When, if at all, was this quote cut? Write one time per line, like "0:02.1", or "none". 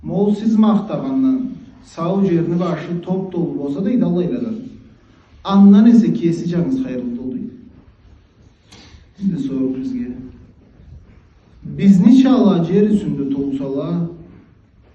none